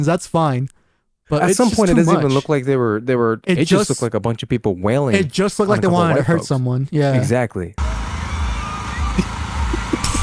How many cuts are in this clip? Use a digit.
2